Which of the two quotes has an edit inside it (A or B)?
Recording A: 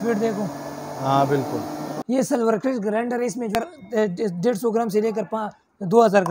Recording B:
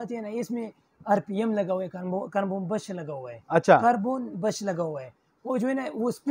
A